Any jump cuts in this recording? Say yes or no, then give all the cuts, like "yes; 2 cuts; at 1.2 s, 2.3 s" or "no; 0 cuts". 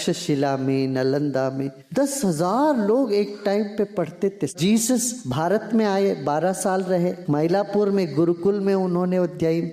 yes; 4 cuts; at 1.8 s, 4.5 s, 5.2 s, 7.2 s